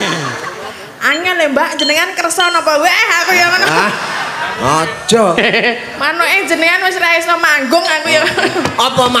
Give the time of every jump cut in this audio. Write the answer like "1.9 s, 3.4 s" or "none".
none